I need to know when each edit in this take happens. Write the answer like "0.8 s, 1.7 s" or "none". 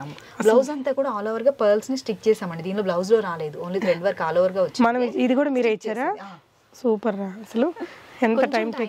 none